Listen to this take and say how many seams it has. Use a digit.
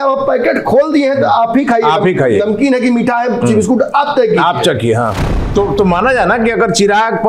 1